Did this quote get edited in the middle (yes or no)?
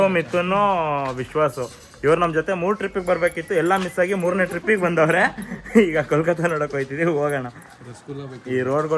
no